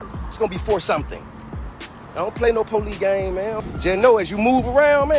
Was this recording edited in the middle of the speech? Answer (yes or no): no